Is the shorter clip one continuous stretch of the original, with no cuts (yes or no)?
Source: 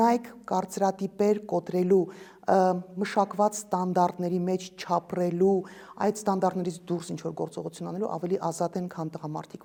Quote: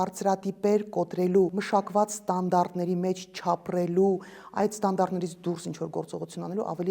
no